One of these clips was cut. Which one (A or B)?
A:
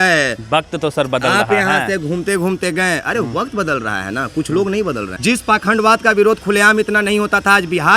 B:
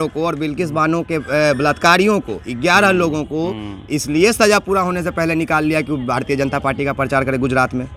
A